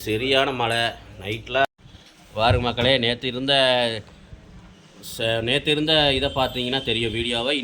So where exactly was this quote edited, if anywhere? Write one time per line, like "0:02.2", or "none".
0:01.6